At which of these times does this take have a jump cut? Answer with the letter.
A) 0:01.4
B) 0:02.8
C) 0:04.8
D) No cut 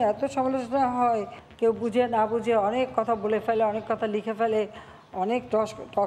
A